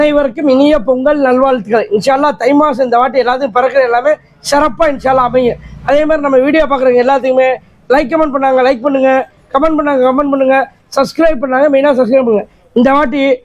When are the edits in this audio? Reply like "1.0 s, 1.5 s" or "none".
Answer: none